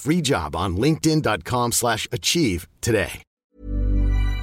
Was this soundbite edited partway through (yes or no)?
yes